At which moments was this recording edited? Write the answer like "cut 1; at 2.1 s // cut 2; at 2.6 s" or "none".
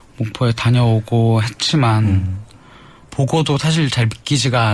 none